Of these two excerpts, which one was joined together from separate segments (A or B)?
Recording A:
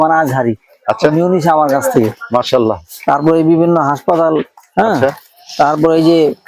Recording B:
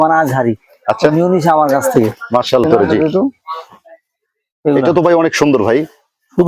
B